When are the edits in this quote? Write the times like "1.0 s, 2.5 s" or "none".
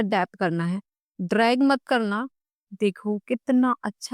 2.3 s

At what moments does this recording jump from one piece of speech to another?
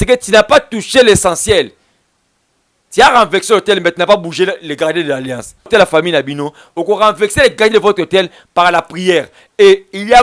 5.7 s

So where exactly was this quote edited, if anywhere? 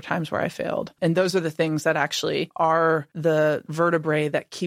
1.0 s, 2.5 s, 3.1 s

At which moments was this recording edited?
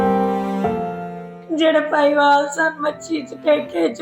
0.9 s

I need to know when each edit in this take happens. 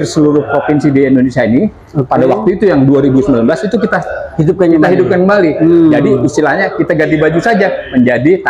none

